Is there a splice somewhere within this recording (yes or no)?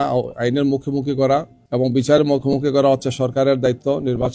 yes